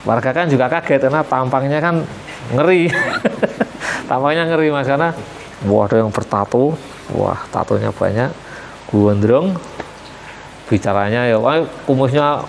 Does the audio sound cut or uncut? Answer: uncut